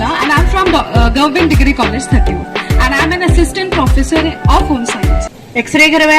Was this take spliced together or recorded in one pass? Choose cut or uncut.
cut